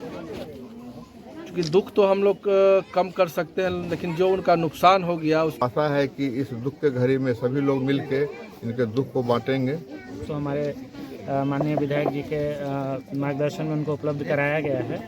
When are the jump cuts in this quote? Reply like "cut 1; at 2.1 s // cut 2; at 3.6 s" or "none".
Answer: cut 1; at 5.6 s // cut 2; at 10.3 s